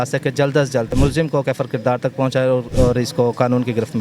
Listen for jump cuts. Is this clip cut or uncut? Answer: cut